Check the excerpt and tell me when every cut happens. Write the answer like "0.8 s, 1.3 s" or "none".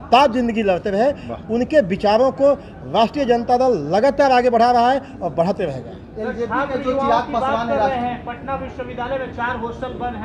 none